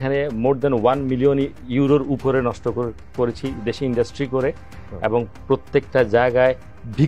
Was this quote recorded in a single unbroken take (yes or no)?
yes